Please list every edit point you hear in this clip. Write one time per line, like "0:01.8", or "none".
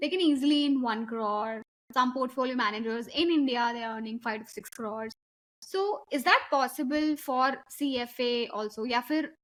none